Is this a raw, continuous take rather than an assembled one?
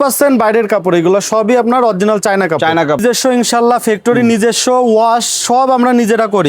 no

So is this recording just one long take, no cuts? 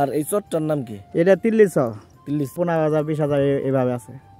no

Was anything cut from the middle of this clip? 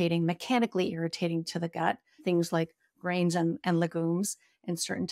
yes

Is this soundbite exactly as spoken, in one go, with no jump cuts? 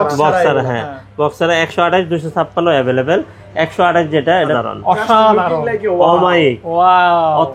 no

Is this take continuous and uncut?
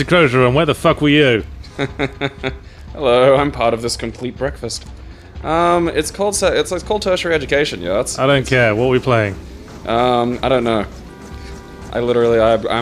yes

